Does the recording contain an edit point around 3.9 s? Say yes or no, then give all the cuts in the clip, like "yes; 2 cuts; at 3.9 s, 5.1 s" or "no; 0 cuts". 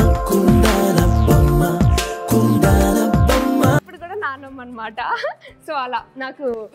yes; 1 cut; at 3.9 s